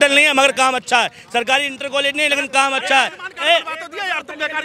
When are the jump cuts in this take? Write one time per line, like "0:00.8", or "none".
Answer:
none